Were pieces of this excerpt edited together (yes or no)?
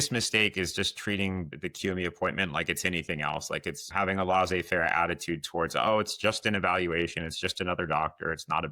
yes